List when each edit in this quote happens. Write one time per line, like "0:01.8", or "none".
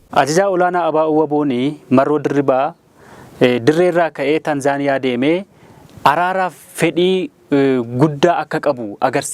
none